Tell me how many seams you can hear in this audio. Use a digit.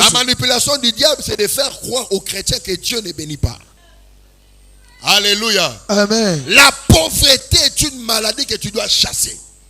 1